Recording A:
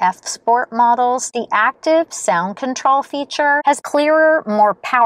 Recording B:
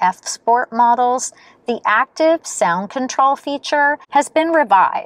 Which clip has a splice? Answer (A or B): A